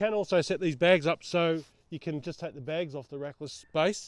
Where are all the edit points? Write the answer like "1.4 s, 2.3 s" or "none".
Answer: none